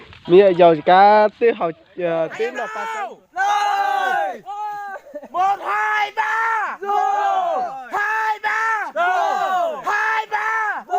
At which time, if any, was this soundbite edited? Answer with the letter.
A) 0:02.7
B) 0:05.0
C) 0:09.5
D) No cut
A